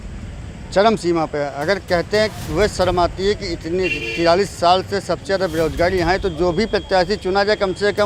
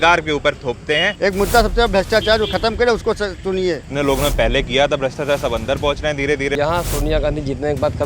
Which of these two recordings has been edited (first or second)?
second